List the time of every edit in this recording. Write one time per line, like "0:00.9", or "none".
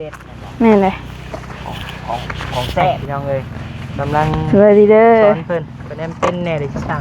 0:03.0